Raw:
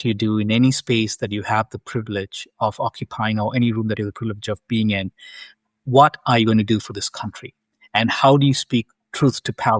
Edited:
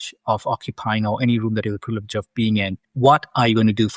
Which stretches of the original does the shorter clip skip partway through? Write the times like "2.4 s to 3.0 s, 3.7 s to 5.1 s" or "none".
5.2 s to 5.7 s